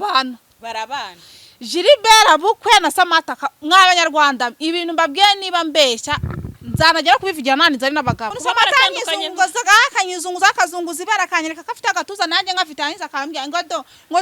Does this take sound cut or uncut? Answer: cut